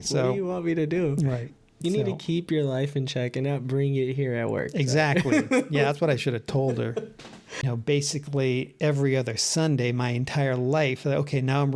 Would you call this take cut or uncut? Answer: cut